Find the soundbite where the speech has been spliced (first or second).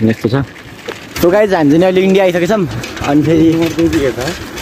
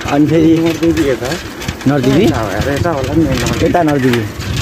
first